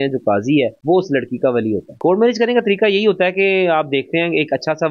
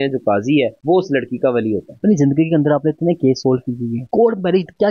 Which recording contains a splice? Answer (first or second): first